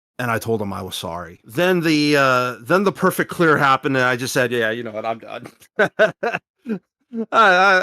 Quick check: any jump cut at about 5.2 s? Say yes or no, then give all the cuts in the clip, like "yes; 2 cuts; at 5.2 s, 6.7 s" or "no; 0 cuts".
no; 1 cut; at 1.4 s